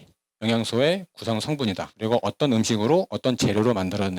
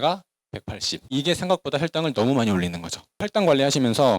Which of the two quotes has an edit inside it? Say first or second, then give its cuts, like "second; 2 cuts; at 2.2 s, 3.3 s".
second; 1 cut; at 0.9 s